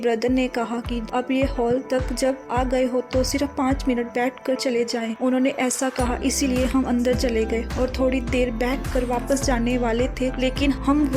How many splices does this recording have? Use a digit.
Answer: 1